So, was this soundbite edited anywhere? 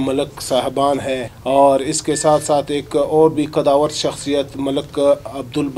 yes; 1 cut; at 1.3 s

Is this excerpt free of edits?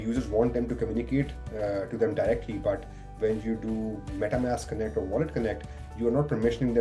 yes; 0 cuts

